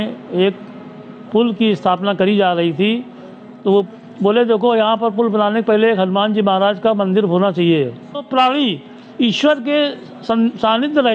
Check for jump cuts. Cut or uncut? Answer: cut